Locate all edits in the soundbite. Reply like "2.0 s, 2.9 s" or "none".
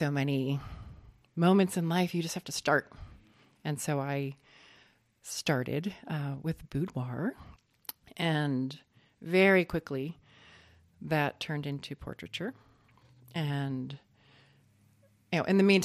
7.5 s